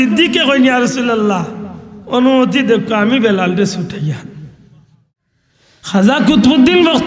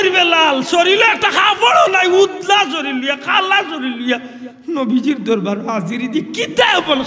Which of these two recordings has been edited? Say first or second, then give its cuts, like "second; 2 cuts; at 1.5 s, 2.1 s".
first; 1 cut; at 4.7 s